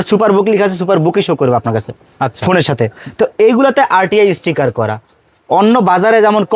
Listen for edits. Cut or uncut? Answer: uncut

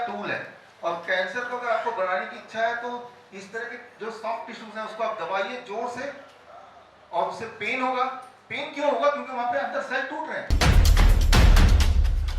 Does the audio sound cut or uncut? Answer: cut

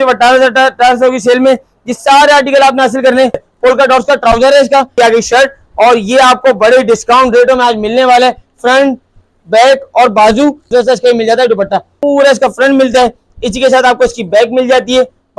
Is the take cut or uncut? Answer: cut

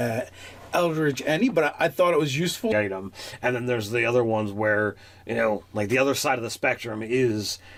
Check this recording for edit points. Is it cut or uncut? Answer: uncut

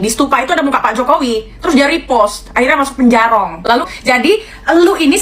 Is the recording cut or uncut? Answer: cut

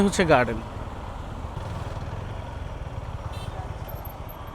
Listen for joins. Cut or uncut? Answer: cut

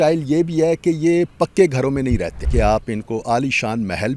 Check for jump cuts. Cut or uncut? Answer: cut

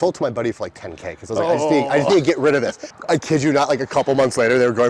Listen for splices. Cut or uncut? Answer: uncut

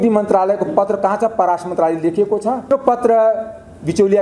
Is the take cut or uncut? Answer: cut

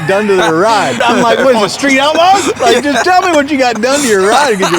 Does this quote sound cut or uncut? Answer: cut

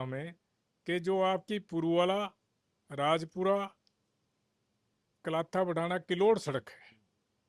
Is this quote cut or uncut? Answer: uncut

